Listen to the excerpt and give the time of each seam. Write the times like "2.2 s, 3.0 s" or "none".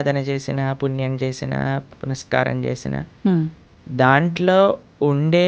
none